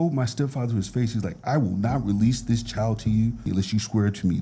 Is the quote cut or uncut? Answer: cut